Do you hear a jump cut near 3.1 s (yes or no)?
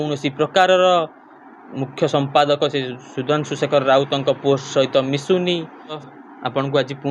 no